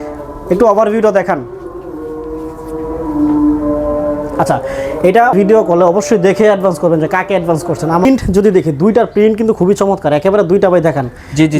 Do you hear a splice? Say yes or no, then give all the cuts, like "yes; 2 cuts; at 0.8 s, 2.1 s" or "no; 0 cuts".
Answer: yes; 2 cuts; at 5.3 s, 8.0 s